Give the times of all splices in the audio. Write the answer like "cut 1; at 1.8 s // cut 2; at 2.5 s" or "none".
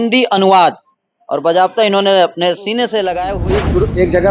cut 1; at 3.3 s